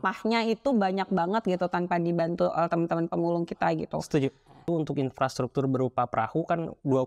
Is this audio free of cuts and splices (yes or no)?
no